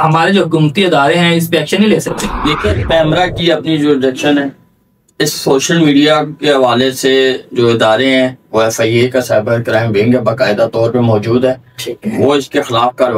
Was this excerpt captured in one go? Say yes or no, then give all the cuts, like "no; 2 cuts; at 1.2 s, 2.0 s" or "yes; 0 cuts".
yes; 0 cuts